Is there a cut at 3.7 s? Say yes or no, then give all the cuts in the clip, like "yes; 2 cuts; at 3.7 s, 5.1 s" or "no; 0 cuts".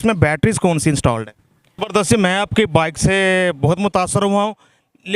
no; 1 cut; at 1.9 s